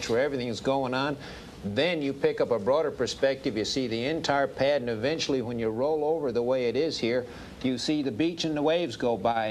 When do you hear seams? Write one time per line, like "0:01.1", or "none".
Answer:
0:03.7